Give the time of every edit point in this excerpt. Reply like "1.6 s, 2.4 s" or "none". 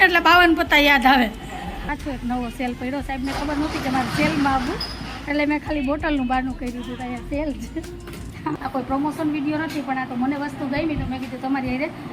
1.8 s, 8.5 s